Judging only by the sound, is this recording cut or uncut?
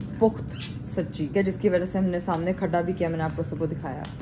uncut